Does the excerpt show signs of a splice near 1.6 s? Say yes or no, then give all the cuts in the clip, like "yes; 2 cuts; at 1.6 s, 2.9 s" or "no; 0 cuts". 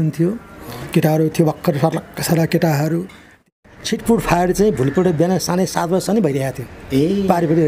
no; 1 cut; at 3.5 s